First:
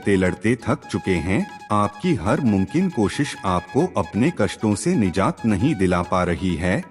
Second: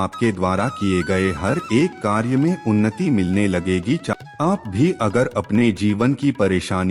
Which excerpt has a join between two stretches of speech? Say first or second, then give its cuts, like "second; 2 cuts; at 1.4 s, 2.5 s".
second; 1 cut; at 4.1 s